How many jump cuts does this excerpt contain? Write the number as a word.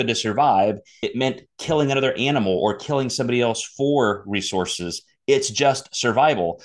one